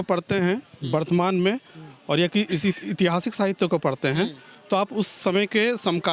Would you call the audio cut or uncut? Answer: uncut